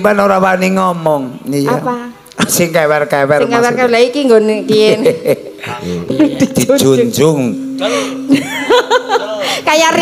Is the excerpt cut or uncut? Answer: cut